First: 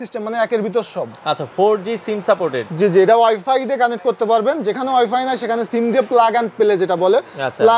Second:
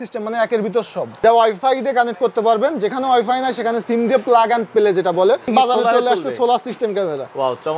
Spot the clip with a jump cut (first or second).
second